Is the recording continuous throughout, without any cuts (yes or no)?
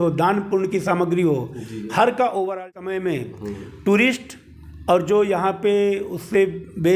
no